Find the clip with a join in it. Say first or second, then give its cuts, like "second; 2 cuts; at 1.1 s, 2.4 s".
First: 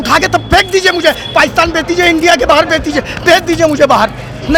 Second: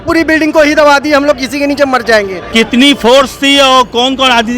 second; 1 cut; at 2.4 s